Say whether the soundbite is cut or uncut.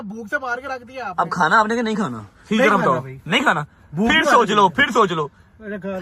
uncut